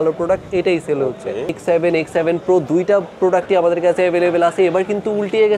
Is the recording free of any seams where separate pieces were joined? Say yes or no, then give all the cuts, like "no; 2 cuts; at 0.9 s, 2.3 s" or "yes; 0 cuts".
no; 1 cut; at 1.6 s